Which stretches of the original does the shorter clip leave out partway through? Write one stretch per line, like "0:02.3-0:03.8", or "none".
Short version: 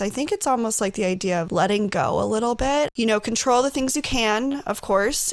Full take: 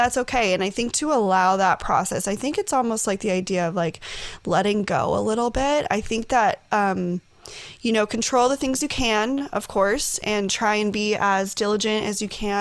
0:03.7-0:04.4
0:05.9-0:07.8

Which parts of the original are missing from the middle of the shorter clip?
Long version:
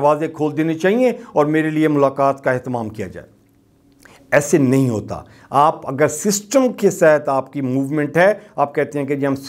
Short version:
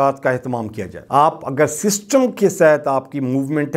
0:03.1-0:05.3

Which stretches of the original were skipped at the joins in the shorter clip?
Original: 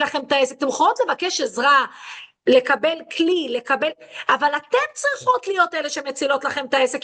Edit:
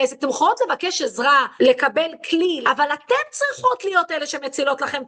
0:01.9-0:02.4
0:03.5-0:04.2

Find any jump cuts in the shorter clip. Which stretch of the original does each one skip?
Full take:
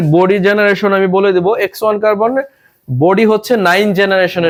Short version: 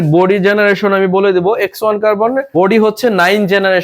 0:02.5-0:02.9

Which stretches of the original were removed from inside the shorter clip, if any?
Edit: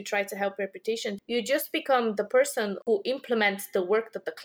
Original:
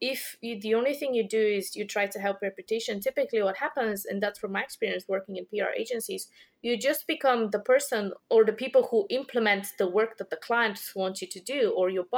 0:03.0-0:06.5
0:08.2-0:08.9

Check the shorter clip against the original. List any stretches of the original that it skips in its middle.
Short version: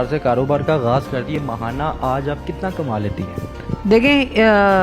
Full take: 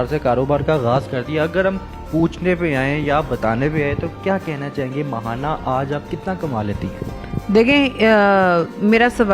0:01.3-0:04.9

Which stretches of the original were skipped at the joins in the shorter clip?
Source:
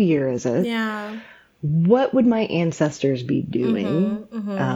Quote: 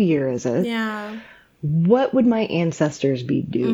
none

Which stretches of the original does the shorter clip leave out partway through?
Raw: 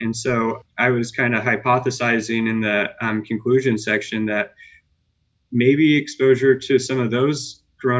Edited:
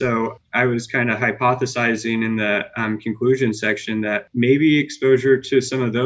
0:04.5-0:05.4

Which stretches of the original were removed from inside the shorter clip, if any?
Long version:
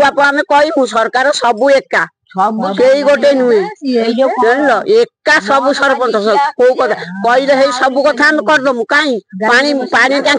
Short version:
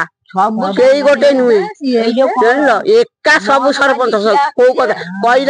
none

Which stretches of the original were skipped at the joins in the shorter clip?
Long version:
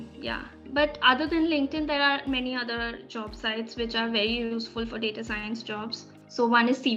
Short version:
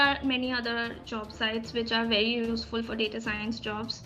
none

